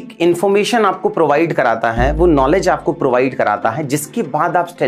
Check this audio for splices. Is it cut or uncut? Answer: uncut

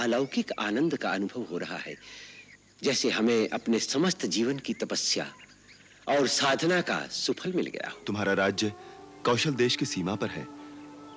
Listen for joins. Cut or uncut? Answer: cut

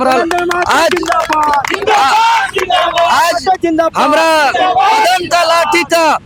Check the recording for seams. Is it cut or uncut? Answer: uncut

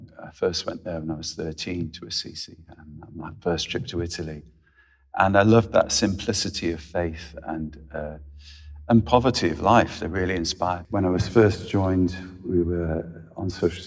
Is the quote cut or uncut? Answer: cut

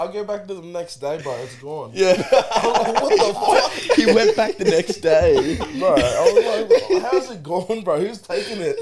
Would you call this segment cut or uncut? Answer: uncut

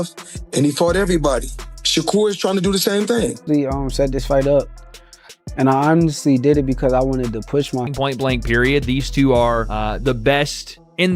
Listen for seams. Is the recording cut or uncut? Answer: cut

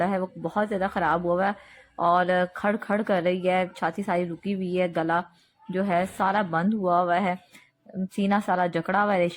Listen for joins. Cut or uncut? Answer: uncut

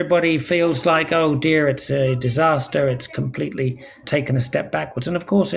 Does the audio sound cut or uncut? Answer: uncut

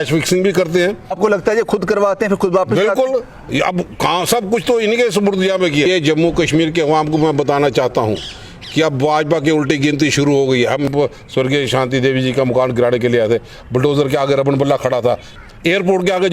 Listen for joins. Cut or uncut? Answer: cut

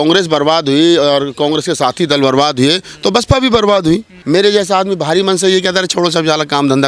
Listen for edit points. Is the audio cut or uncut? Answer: cut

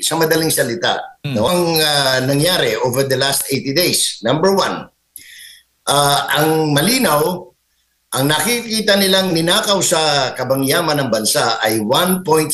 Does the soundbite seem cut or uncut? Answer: cut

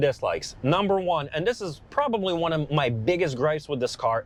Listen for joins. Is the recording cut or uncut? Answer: uncut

